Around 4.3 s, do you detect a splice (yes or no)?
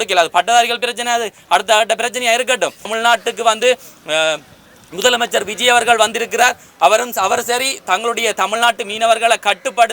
no